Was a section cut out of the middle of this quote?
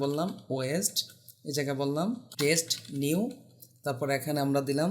yes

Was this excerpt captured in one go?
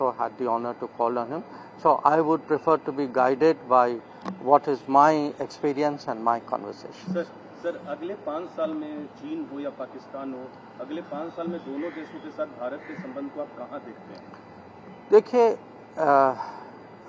yes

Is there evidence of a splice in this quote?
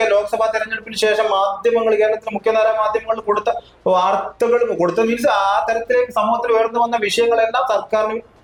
no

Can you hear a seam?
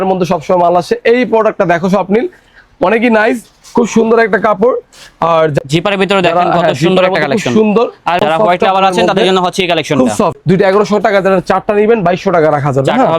yes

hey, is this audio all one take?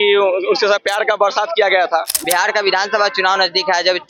no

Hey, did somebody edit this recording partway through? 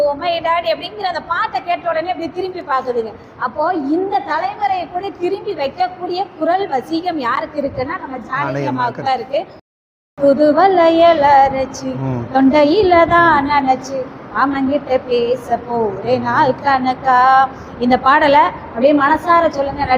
yes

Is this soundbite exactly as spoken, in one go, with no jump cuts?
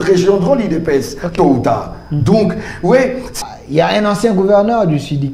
no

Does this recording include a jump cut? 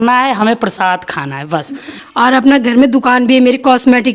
yes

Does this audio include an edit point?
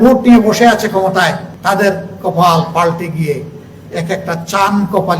yes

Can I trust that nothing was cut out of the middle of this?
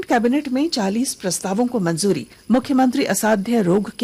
no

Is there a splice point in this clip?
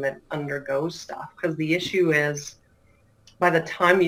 no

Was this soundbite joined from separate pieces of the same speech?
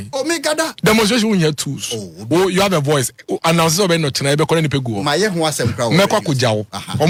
no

